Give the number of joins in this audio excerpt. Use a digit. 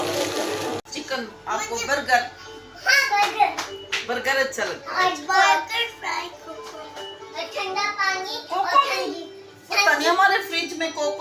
1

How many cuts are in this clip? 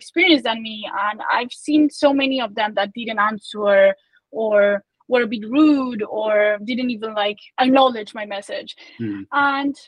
1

